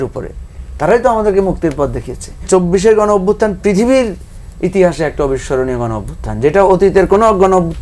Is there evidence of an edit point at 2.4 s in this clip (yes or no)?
yes